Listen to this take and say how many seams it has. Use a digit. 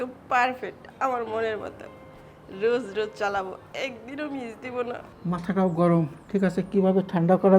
1